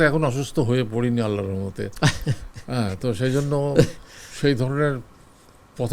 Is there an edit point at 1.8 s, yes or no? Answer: no